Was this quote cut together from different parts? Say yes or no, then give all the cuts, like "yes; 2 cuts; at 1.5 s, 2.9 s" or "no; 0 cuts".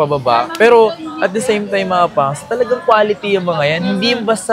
no; 0 cuts